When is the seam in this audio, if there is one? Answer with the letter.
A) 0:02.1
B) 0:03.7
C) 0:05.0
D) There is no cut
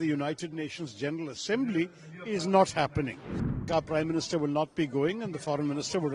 B